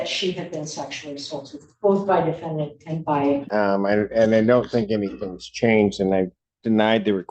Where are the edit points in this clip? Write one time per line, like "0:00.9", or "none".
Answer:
0:03.5